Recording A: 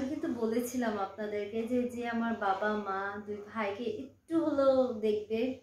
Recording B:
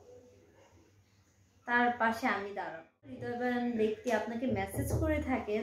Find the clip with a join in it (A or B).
B